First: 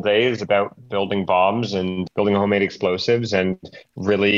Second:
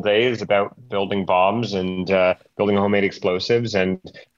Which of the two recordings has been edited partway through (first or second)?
first